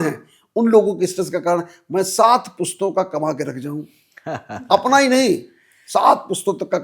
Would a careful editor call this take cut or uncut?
uncut